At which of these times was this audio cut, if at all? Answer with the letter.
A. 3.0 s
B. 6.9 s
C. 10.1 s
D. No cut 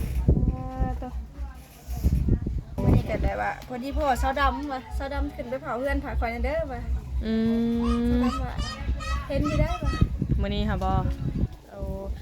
A